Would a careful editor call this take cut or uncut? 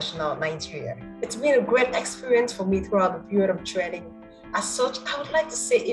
cut